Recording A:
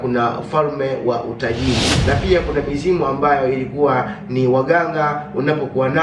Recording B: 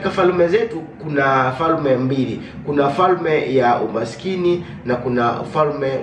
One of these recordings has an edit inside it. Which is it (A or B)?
A